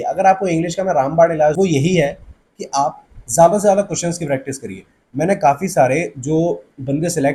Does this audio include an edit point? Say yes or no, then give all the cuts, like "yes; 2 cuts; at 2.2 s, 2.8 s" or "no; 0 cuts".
no; 0 cuts